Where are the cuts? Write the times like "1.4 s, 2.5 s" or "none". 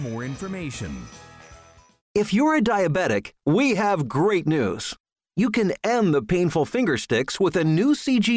1.9 s

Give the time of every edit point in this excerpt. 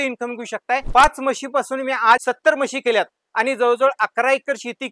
none

